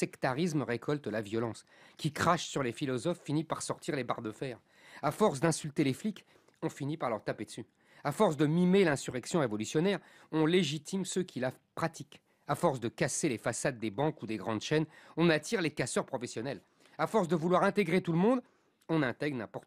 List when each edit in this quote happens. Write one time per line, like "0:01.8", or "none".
none